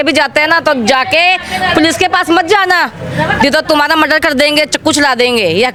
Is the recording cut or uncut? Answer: uncut